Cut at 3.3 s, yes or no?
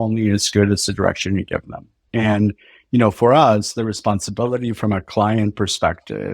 no